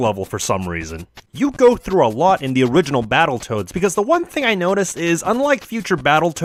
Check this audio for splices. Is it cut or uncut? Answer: uncut